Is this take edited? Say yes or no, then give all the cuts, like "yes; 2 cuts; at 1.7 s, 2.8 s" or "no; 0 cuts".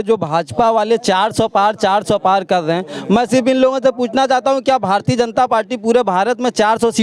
no; 0 cuts